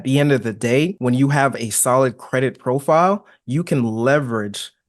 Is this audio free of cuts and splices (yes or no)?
no